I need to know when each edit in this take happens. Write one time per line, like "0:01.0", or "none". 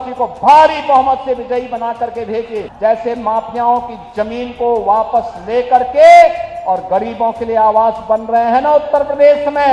0:02.6